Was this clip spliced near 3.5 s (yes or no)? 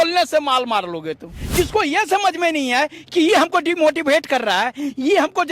no